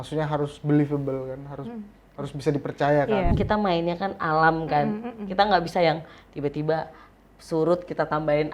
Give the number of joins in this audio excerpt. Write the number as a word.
one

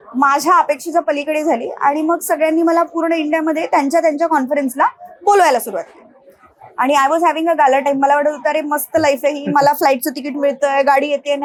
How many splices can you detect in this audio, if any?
zero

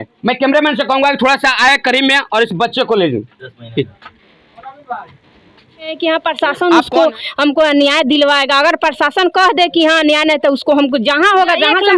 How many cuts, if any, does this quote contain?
one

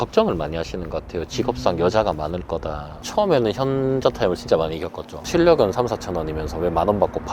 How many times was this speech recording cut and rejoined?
two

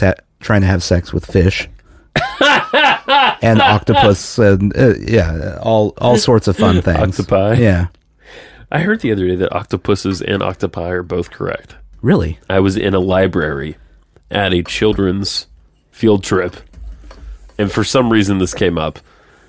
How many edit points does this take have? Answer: zero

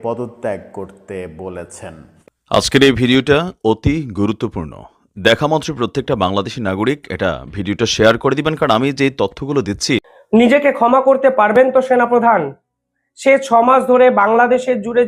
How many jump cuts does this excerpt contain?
one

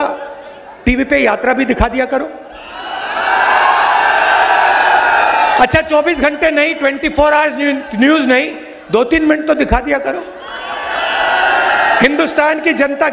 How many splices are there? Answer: zero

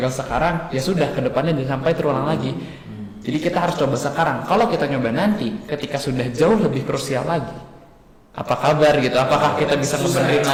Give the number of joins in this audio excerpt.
zero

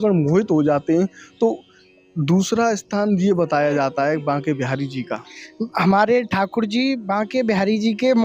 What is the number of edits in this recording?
zero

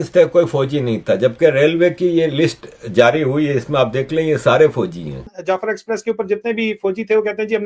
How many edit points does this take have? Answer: one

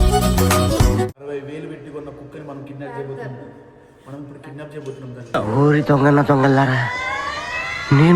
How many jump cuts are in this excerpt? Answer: one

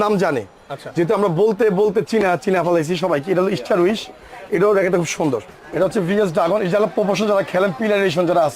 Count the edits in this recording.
one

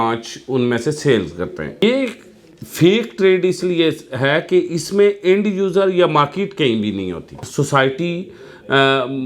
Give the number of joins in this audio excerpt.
two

